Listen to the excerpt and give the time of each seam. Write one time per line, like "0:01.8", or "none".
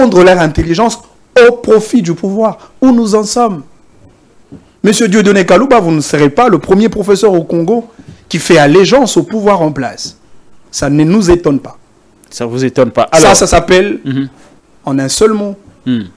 none

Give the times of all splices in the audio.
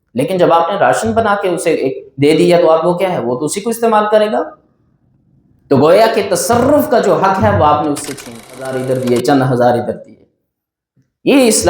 0:08.8

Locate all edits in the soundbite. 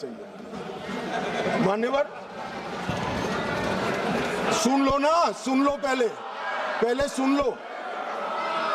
0:04.5

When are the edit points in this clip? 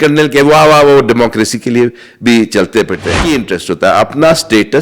0:03.3

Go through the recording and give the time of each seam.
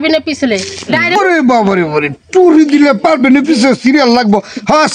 0:01.2

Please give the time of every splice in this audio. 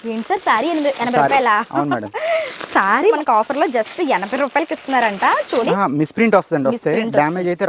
0:03.2
0:05.6

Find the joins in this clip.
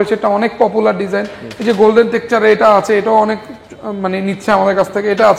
none

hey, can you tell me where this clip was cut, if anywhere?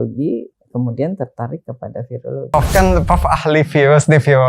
0:02.5

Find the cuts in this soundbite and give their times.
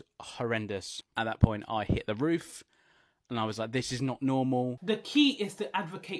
0:01.0
0:04.8

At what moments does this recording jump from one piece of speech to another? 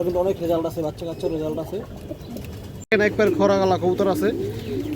0:02.9

